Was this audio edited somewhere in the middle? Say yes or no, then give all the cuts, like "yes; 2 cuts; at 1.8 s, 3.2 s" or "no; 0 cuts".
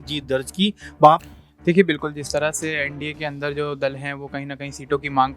yes; 1 cut; at 1.2 s